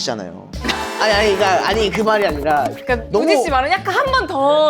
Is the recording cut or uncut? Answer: cut